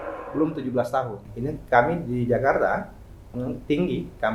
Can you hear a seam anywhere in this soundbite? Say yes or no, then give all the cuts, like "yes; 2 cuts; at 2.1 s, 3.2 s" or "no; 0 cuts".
yes; 1 cut; at 1.2 s